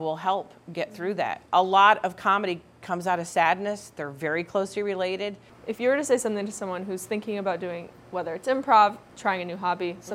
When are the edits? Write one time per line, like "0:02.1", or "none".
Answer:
0:01.4
0:05.5
0:09.1

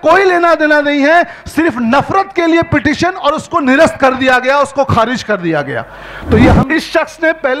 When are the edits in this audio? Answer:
0:06.6

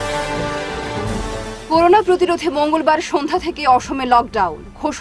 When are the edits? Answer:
none

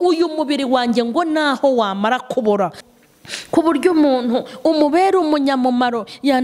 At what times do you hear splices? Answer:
0:02.8

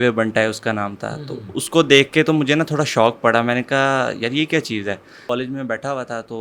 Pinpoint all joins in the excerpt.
0:05.1

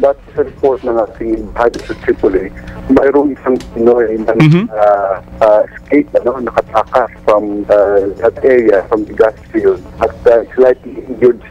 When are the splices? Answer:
0:05.2
0:07.2
0:09.9

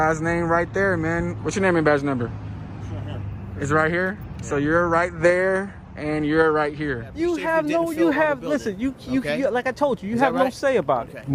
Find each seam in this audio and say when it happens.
0:07.1

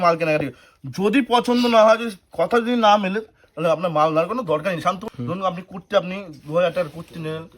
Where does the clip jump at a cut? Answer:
0:05.0

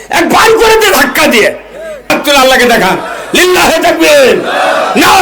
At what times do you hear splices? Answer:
0:02.1

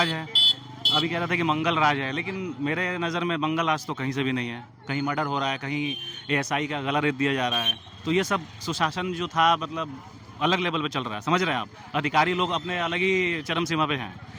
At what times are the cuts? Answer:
none

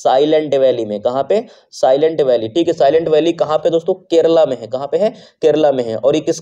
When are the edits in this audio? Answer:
none

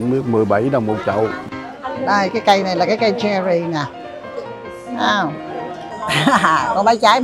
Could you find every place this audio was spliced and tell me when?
0:01.4
0:05.9

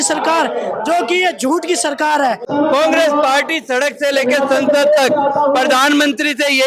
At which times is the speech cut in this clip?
0:02.5

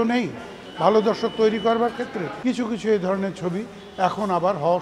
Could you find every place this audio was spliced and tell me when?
0:02.2

